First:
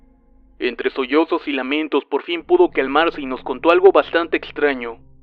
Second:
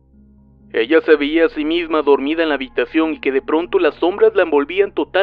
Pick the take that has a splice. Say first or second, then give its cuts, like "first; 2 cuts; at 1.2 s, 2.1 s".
first; 1 cut; at 2.8 s